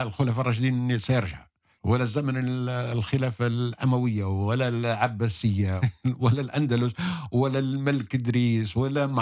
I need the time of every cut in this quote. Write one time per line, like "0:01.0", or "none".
none